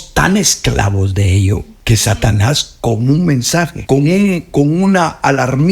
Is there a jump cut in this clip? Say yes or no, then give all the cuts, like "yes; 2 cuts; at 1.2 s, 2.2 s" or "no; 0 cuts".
yes; 2 cuts; at 1.7 s, 3.8 s